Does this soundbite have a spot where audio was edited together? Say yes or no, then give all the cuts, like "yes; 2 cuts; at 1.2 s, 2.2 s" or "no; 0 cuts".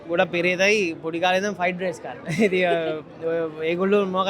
no; 0 cuts